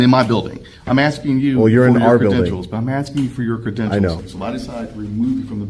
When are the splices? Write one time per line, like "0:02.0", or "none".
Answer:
0:04.3